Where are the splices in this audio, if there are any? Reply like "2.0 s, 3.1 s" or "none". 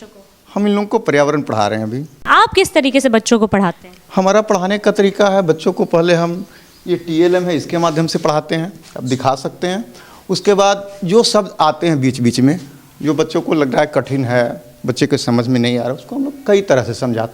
none

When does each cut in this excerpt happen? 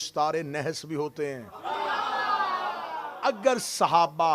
3.1 s

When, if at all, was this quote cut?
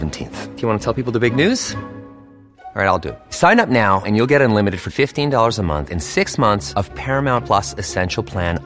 none

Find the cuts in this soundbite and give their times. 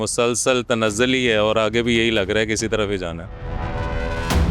3.4 s

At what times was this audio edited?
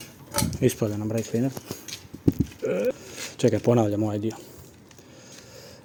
none

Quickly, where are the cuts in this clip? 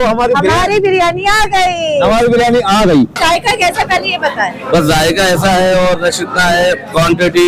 3.2 s

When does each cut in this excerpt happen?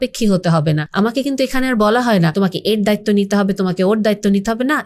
0.9 s, 2.3 s

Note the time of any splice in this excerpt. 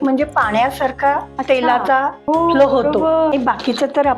1.3 s, 2.2 s, 3.3 s

